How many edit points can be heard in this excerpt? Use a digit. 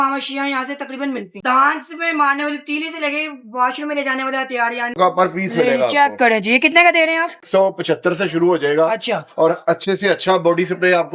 3